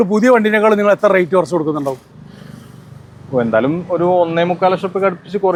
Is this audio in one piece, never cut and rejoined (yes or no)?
yes